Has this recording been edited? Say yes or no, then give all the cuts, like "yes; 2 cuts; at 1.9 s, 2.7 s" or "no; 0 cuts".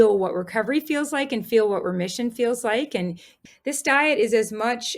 yes; 1 cut; at 3.3 s